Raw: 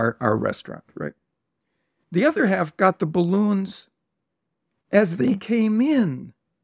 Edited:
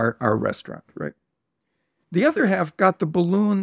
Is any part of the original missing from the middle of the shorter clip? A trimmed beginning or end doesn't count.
no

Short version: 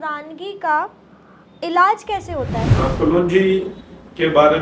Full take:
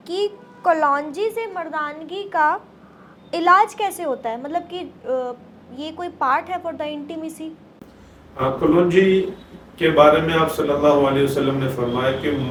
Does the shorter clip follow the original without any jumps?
no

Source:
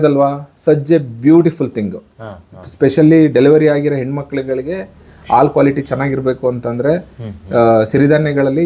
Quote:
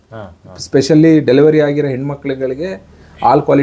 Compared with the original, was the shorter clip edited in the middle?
no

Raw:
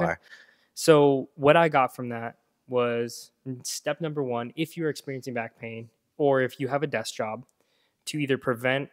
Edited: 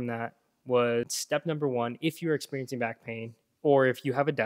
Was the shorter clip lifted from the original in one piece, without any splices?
no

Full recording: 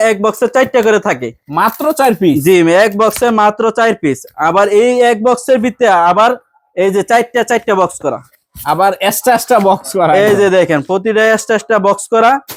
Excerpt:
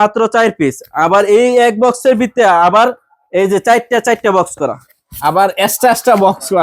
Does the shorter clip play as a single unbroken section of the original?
yes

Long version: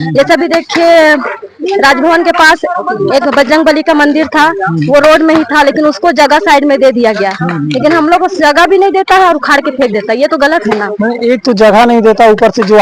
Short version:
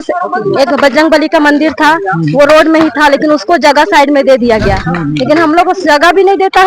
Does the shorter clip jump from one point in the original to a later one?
no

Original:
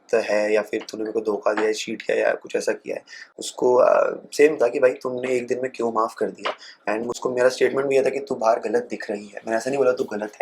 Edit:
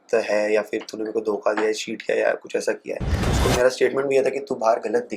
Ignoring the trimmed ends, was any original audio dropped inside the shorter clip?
yes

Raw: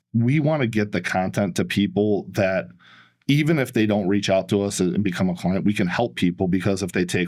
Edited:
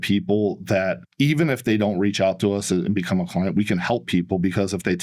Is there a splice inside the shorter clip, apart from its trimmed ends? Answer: yes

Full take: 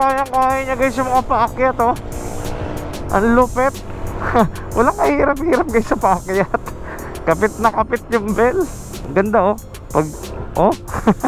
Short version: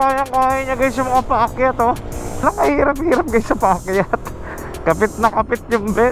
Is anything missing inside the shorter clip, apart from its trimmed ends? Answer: yes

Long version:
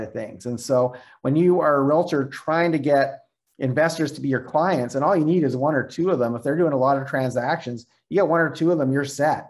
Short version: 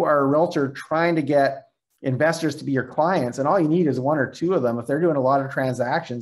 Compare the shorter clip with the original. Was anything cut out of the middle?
no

